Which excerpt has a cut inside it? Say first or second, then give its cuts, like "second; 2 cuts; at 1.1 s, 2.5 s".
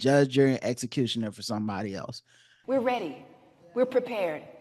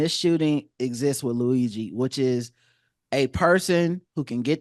first; 1 cut; at 2.5 s